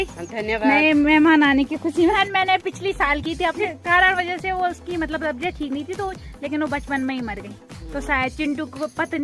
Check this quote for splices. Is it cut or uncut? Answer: cut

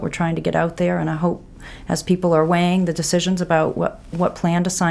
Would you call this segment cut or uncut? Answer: uncut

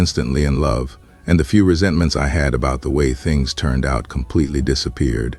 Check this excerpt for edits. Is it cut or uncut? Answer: uncut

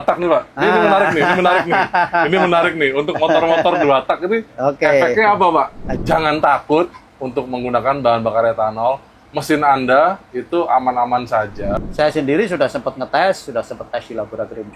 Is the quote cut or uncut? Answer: cut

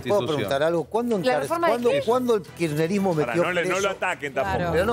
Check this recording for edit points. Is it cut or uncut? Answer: uncut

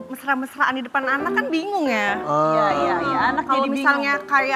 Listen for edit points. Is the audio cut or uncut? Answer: uncut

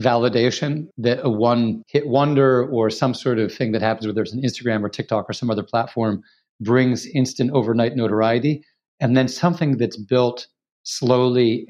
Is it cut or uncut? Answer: cut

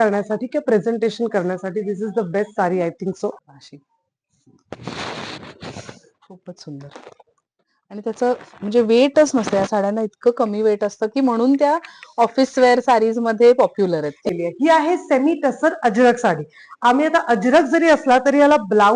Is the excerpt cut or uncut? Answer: cut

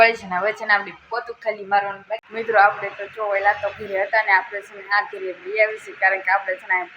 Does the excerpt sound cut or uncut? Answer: cut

